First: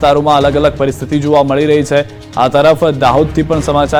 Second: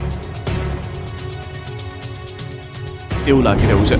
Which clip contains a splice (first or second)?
second